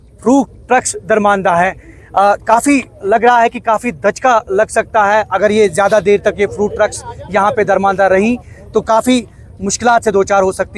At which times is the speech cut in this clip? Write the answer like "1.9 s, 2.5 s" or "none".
none